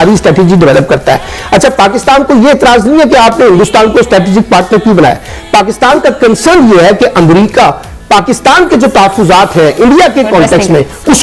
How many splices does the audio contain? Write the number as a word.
one